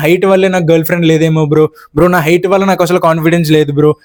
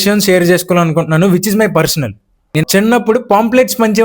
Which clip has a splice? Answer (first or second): second